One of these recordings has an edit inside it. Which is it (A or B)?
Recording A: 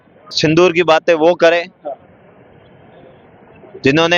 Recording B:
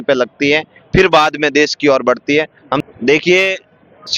B